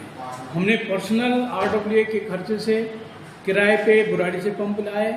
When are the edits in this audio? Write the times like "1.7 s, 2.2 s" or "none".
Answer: none